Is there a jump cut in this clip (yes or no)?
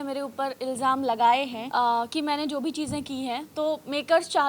yes